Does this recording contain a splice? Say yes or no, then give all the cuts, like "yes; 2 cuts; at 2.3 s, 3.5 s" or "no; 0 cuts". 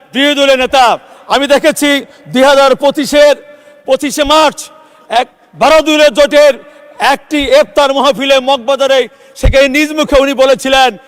no; 0 cuts